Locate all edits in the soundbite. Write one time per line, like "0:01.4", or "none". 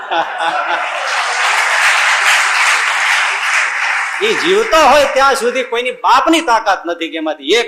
none